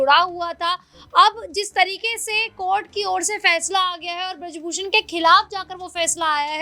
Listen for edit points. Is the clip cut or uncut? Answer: uncut